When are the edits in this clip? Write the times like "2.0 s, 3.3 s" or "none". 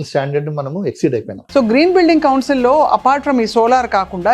1.3 s